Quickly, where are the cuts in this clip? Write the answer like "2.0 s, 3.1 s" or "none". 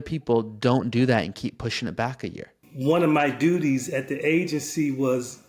2.7 s